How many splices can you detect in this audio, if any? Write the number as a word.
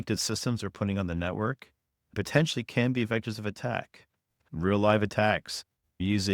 one